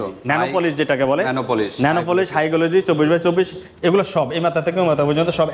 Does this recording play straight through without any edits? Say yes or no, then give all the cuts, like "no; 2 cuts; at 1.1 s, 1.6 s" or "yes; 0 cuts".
yes; 0 cuts